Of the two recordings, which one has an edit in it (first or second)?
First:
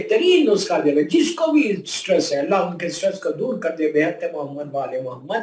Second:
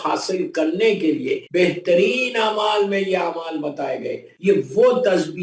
second